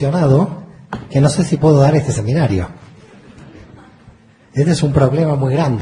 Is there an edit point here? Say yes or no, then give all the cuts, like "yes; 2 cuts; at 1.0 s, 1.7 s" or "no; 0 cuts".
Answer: no; 0 cuts